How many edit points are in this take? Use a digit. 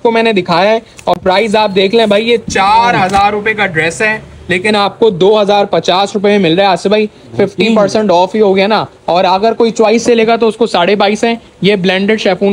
0